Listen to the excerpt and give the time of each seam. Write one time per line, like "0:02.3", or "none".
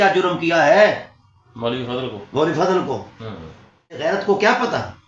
0:04.0